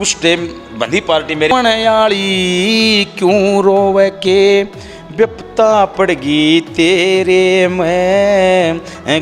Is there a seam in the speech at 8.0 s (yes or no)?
no